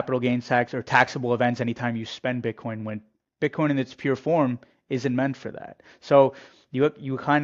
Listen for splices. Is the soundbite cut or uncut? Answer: uncut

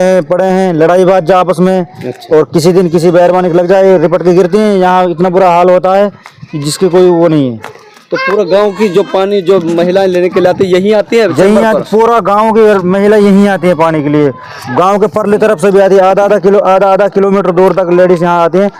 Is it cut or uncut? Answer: uncut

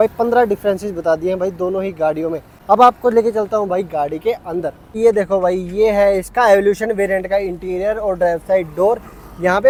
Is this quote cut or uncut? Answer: uncut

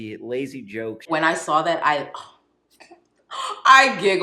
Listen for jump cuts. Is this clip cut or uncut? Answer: cut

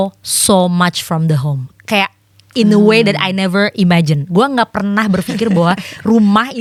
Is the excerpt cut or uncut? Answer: uncut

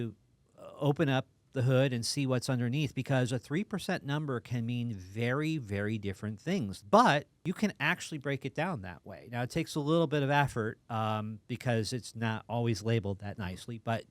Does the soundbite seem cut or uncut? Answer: cut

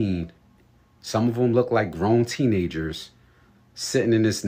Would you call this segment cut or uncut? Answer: uncut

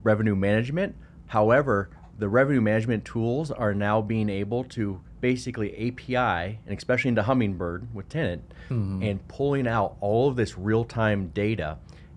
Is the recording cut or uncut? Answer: uncut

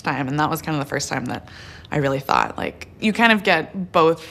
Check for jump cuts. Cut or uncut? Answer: uncut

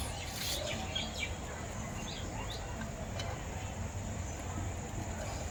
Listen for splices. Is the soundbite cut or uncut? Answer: uncut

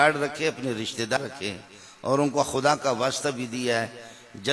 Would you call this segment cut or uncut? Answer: cut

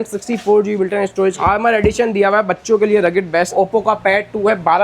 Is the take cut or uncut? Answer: cut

